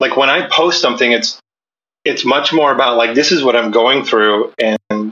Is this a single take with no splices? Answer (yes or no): yes